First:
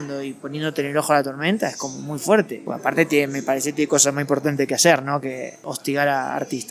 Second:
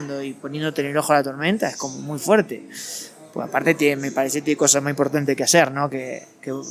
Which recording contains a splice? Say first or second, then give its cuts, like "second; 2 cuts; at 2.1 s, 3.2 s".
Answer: first; 2 cuts; at 2.6 s, 5.6 s